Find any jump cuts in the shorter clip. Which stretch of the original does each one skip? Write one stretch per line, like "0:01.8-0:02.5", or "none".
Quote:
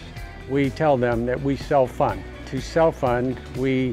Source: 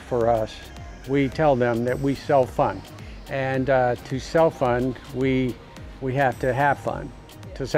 0:03.1-0:04.1